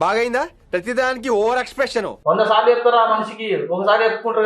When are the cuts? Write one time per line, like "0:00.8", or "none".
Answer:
0:02.1